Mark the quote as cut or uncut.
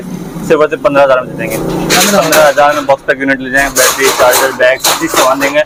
uncut